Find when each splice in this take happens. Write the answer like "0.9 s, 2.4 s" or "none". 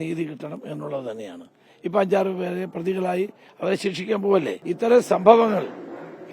4.6 s